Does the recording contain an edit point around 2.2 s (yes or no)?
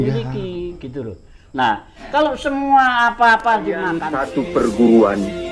no